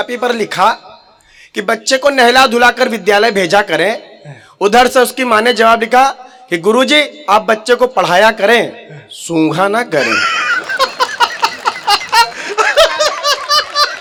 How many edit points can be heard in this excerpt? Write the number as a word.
zero